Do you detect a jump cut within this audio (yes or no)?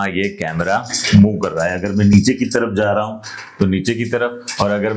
no